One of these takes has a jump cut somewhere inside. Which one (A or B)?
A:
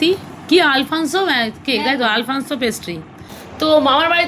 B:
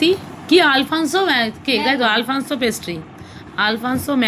A